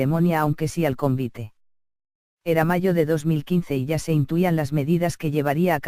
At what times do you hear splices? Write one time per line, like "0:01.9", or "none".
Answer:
0:01.9